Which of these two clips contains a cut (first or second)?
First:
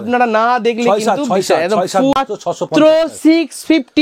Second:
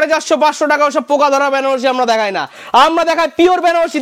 first